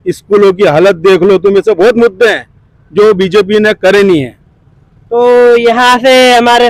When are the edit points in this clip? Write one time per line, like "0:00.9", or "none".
none